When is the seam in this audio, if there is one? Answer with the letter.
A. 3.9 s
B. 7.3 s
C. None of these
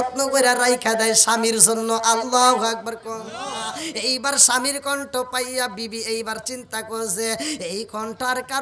A